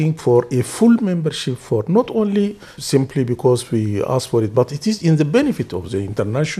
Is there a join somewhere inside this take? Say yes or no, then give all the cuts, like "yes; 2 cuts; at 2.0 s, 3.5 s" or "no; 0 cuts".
yes; 1 cut; at 2.7 s